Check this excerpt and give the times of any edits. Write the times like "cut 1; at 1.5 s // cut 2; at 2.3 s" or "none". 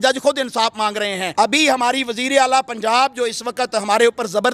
cut 1; at 1.2 s